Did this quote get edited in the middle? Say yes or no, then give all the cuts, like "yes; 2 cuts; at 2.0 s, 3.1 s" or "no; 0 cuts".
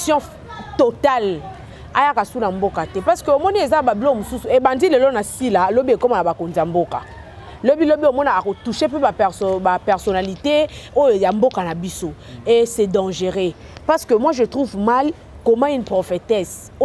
no; 0 cuts